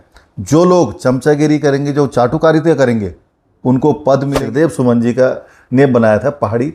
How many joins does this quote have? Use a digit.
1